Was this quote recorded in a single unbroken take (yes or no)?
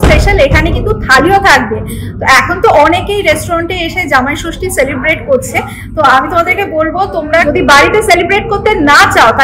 yes